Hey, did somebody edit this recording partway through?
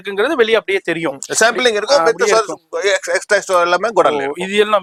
no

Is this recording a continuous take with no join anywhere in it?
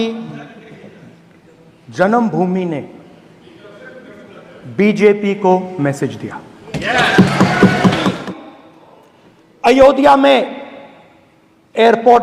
no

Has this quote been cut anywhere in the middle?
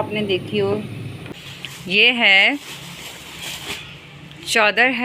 yes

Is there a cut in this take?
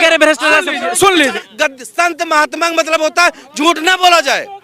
yes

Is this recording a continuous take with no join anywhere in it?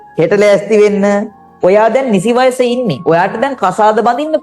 no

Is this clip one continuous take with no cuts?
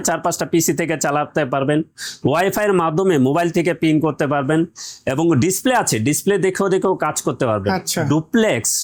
yes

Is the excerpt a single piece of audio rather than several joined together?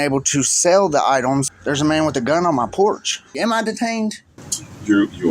no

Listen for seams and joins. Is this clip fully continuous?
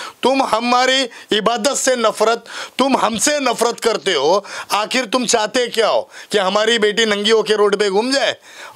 yes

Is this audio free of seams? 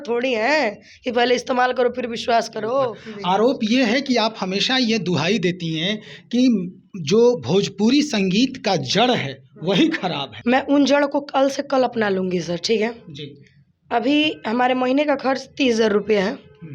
no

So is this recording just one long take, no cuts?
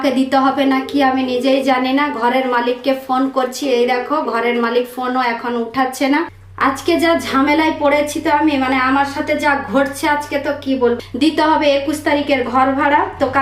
no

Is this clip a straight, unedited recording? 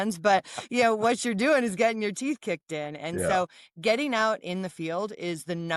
yes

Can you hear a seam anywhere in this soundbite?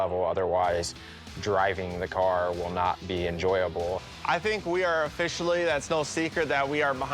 yes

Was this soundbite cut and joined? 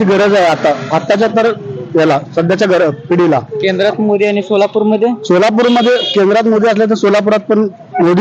no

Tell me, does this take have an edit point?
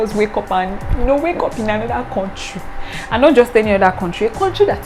no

